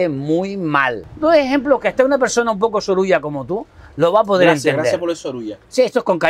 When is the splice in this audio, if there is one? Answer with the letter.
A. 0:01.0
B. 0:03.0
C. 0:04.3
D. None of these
A